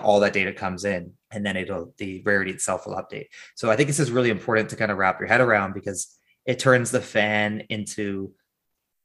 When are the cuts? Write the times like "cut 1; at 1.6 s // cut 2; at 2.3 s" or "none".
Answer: cut 1; at 1.2 s

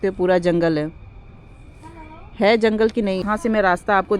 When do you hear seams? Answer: cut 1; at 3.2 s

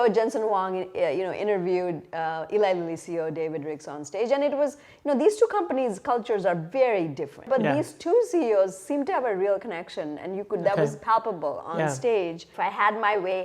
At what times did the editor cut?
cut 1; at 7.5 s // cut 2; at 12.5 s

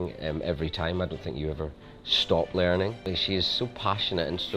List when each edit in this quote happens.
cut 1; at 3.0 s

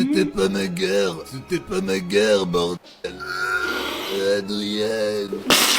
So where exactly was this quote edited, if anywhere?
none

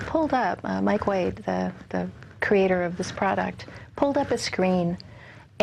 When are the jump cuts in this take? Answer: none

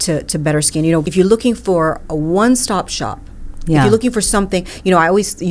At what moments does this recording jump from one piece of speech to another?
cut 1; at 1.1 s

